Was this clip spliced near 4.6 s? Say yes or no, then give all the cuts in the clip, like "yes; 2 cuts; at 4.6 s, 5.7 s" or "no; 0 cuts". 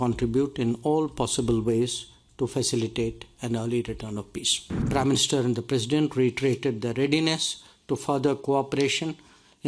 yes; 1 cut; at 4.6 s